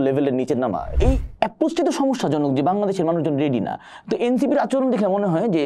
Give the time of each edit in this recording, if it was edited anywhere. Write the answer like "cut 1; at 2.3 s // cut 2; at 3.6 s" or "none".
cut 1; at 0.9 s